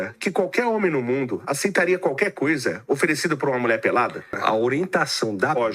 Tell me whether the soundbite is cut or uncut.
cut